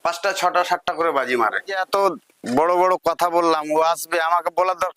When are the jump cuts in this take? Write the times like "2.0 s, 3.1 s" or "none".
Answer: 1.8 s